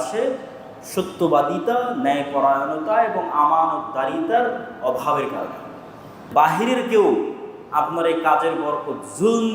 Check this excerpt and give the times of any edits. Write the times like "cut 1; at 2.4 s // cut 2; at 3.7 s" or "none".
cut 1; at 6.3 s